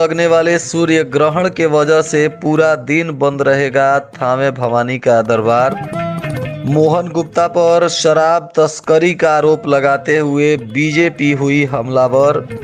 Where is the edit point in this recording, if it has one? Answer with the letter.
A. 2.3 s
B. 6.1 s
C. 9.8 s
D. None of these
D